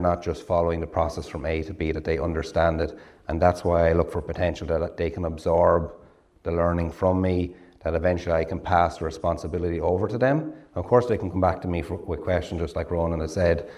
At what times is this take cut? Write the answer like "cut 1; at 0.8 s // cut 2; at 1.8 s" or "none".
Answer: none